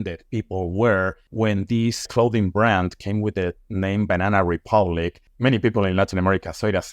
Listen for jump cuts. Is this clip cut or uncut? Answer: cut